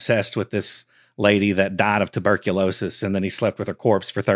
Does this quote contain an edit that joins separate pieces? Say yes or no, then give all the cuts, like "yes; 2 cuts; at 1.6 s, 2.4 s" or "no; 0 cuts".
no; 0 cuts